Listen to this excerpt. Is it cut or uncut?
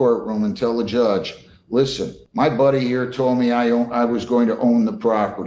cut